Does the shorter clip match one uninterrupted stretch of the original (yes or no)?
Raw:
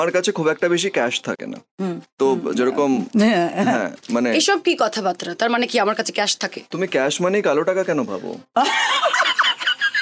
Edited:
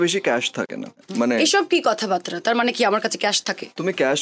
no